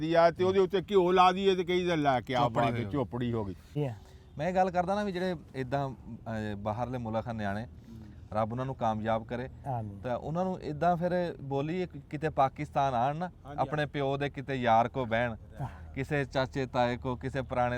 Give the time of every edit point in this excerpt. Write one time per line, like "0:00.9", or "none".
0:03.6